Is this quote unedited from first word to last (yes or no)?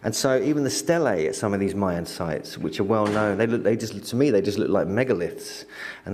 yes